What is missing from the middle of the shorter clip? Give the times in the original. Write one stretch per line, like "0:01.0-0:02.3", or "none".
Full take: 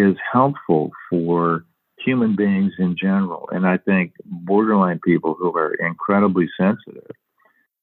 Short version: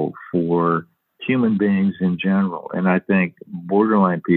none